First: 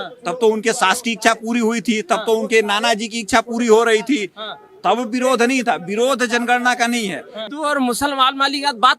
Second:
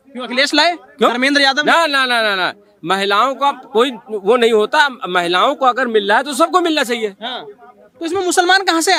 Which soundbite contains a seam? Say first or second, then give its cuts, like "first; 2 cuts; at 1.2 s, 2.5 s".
first; 1 cut; at 7.5 s